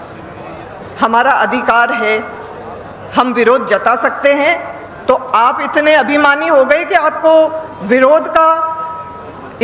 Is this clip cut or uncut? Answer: uncut